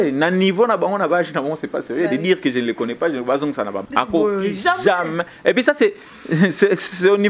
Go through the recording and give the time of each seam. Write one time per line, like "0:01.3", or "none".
0:03.8

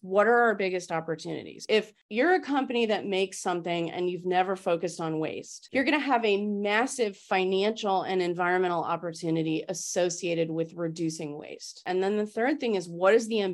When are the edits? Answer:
none

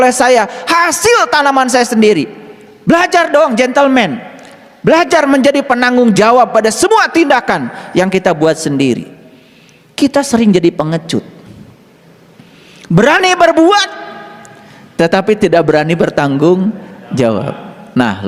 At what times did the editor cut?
none

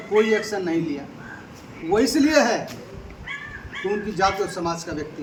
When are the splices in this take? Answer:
none

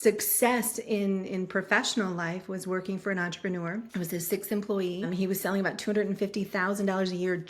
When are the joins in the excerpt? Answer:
0:03.9
0:05.1

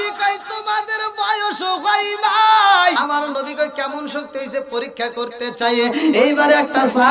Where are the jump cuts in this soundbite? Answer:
0:02.9

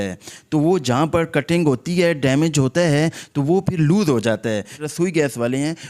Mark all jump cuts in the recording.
0:04.8

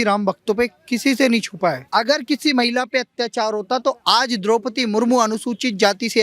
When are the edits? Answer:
0:01.8

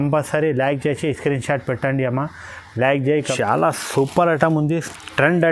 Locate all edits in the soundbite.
0:03.3

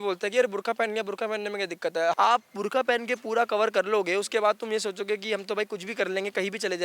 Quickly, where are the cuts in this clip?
0:02.1

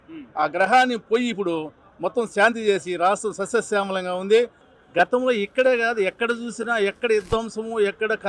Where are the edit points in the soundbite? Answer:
0:04.6

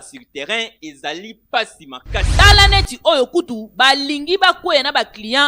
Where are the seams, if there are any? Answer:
0:02.3

